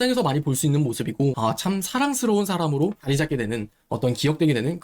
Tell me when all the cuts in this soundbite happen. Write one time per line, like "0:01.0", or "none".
0:01.4